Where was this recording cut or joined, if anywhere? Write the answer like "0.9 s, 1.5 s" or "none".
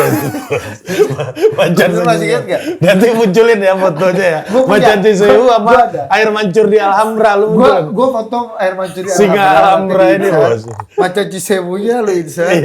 none